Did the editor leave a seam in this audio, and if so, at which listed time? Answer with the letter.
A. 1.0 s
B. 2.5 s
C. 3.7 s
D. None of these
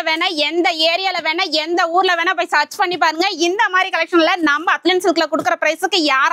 D